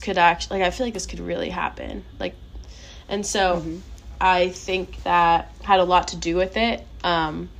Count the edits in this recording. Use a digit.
0